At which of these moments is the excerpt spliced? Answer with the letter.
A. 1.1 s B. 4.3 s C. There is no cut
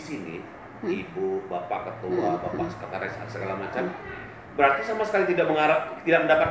C